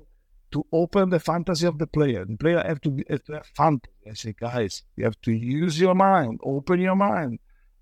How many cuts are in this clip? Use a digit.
0